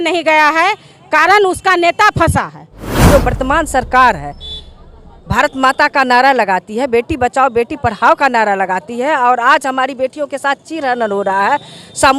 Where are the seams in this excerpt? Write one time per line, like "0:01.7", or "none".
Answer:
0:03.0